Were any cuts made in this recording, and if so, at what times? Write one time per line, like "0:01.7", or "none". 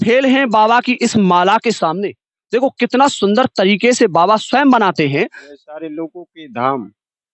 0:05.5